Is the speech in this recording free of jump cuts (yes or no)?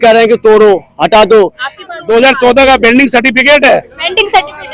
no